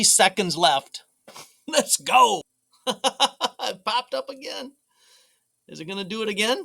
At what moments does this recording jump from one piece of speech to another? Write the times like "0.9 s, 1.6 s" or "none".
2.6 s

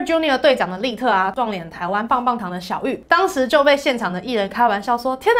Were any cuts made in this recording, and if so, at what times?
1.3 s, 3.0 s

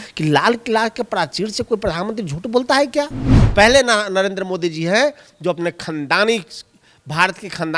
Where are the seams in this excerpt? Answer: 3.4 s

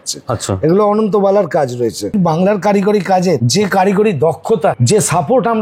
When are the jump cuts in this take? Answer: 2.1 s, 3.4 s, 4.8 s

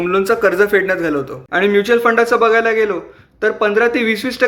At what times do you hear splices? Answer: 1.6 s

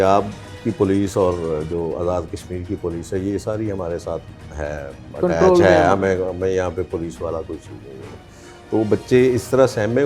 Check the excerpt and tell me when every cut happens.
none

